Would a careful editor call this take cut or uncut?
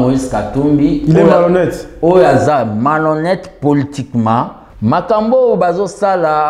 cut